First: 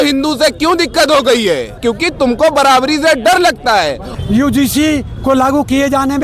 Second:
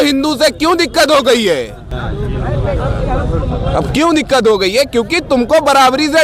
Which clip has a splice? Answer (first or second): first